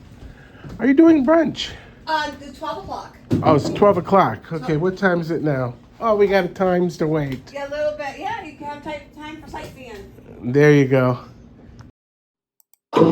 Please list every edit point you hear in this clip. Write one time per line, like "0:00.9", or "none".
0:12.0